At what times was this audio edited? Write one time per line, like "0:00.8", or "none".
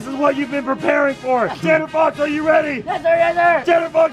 0:01.6